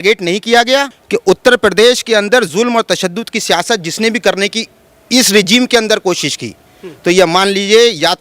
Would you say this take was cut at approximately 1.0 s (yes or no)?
yes